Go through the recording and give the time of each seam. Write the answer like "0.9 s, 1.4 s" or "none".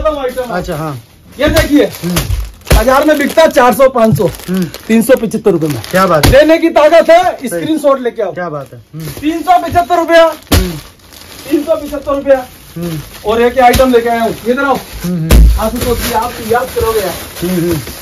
none